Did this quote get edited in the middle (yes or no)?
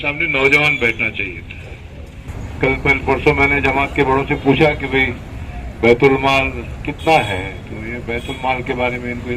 yes